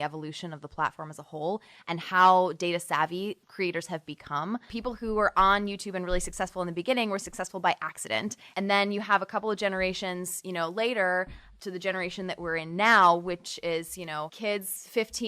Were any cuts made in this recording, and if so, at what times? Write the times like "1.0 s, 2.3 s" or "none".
3.4 s, 4.7 s, 8.5 s, 11.5 s, 14.3 s